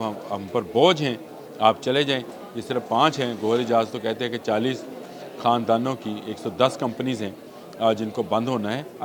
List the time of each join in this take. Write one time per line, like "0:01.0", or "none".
none